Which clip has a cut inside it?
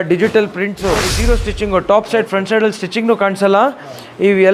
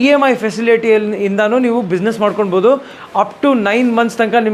first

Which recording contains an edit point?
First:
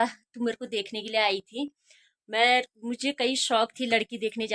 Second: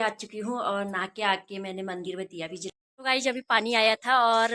second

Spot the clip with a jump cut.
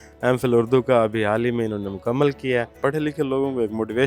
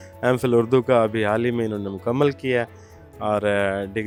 first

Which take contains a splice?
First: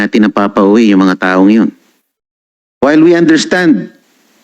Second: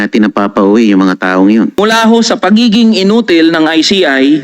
second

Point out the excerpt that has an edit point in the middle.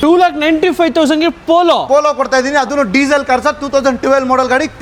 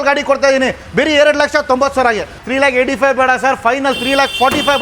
second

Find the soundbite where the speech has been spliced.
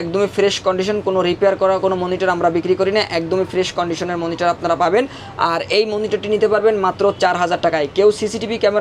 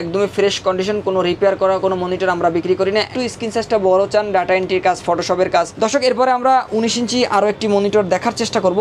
second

